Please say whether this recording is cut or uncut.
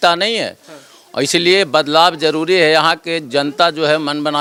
uncut